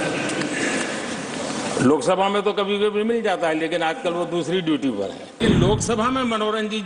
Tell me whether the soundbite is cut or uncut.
cut